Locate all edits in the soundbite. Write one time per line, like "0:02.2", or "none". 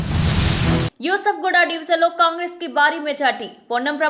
none